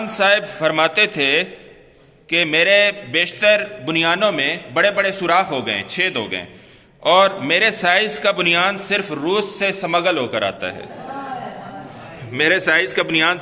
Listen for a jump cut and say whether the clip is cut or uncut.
uncut